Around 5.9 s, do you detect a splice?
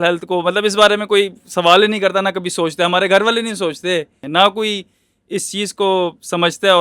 no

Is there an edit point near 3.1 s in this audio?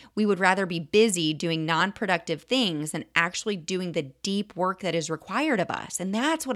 no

